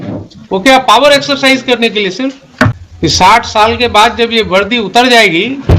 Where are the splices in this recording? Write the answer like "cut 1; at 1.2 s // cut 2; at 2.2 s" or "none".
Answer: cut 1; at 2.8 s